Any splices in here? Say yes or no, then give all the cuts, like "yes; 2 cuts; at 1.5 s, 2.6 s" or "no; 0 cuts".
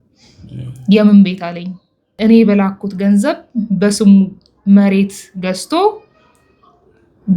yes; 1 cut; at 2.1 s